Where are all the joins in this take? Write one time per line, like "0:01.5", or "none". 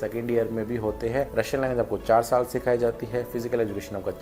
0:01.3